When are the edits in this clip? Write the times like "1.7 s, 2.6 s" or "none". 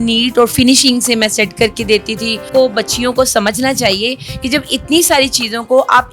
2.5 s